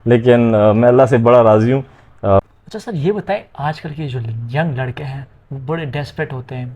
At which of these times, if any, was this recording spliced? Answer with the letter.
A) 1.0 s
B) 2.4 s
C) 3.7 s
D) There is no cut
B